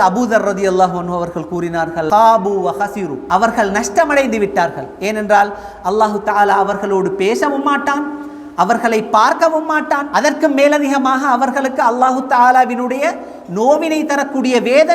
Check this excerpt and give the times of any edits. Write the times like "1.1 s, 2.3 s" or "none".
2.1 s, 3.2 s, 10.0 s